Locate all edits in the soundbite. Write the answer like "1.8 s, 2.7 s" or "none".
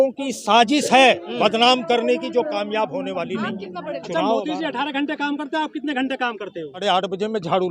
4.0 s, 6.8 s